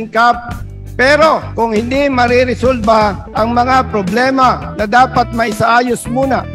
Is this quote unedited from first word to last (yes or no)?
no